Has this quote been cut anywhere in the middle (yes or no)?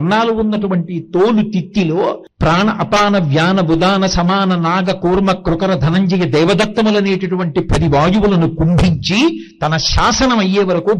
yes